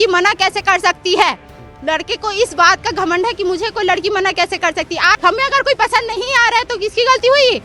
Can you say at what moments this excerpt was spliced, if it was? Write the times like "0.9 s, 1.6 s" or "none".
5.1 s